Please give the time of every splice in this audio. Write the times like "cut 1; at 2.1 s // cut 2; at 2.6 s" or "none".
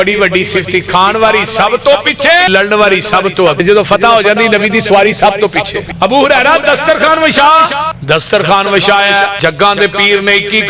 cut 1; at 2.5 s // cut 2; at 3.6 s // cut 3; at 5.8 s // cut 4; at 7.9 s // cut 5; at 9.3 s